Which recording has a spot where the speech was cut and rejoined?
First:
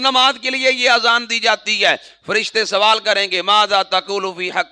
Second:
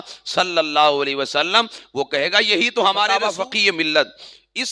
second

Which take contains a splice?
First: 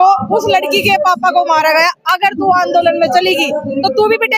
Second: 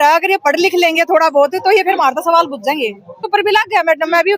second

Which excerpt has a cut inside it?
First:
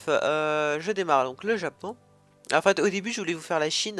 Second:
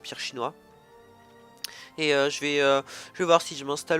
second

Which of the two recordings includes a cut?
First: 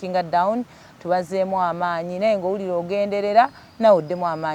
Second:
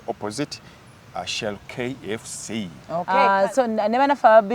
second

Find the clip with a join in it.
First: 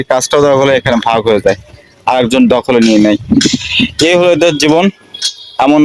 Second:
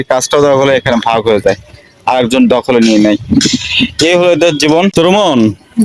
second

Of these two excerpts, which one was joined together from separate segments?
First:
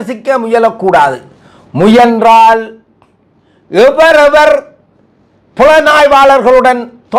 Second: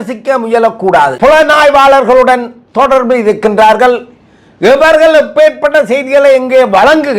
second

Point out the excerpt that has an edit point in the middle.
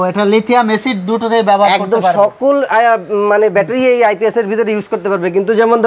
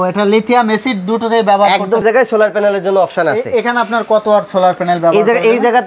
second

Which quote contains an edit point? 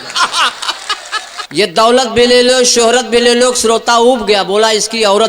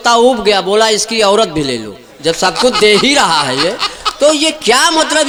first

